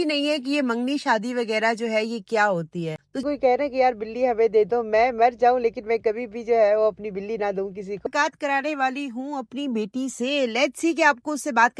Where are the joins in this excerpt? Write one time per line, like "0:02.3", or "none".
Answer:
0:03.2
0:08.1